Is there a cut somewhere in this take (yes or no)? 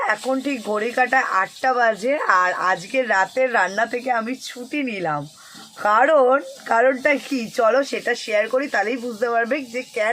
no